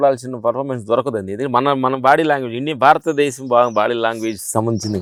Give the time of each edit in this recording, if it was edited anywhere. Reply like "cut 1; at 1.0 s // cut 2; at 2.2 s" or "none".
none